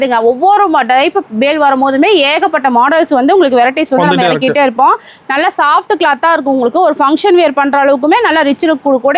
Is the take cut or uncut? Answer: uncut